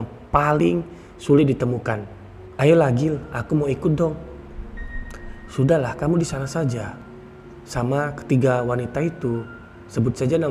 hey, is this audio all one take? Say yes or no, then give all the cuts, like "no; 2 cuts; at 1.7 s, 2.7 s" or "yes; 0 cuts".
yes; 0 cuts